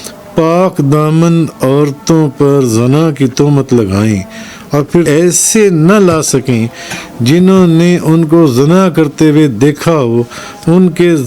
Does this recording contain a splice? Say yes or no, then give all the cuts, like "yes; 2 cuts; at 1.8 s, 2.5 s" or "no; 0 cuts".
yes; 1 cut; at 5.1 s